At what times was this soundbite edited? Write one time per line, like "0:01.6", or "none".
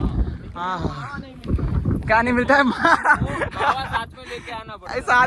none